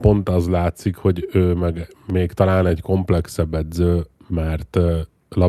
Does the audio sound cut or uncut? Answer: uncut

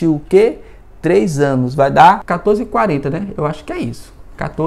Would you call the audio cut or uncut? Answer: cut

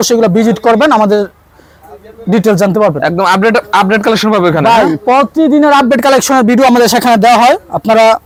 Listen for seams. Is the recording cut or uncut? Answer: uncut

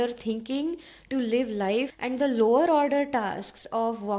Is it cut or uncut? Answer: cut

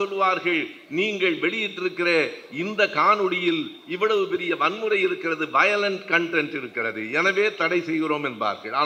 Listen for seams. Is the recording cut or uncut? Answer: uncut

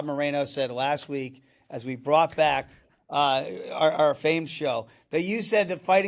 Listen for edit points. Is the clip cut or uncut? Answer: uncut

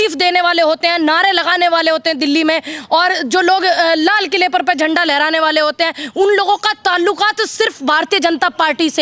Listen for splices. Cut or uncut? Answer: uncut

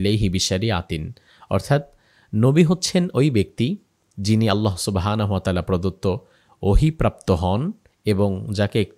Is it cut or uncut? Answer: uncut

